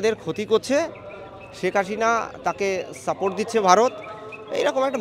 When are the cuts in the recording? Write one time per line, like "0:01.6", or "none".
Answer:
none